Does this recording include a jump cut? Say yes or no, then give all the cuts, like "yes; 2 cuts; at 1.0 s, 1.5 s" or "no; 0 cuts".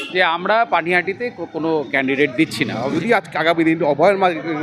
yes; 1 cut; at 2.8 s